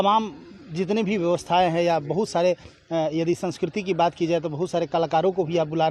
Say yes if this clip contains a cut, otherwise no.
no